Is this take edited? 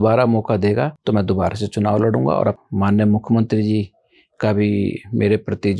yes; 1 cut; at 2.6 s

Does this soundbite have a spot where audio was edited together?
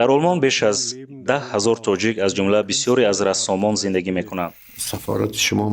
yes; 1 cut; at 4.6 s

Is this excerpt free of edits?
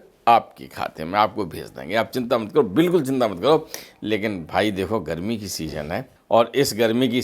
no; 1 cut; at 6.2 s

